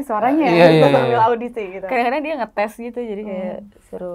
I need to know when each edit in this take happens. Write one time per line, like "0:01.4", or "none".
none